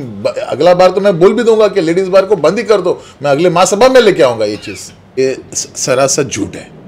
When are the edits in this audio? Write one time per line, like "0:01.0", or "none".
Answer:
0:05.2